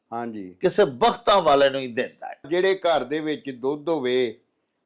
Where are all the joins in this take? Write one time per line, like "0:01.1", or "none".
0:02.5